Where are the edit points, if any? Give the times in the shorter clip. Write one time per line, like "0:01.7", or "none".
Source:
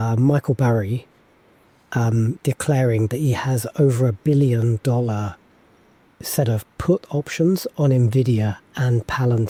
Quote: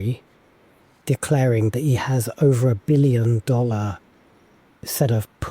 0:01.0